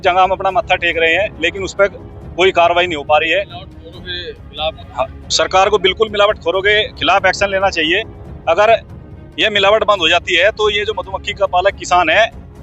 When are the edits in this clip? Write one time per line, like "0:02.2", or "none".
none